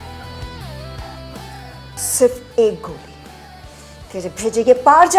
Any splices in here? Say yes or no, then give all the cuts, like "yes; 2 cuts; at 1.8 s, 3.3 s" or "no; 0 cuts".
yes; 1 cut; at 2.0 s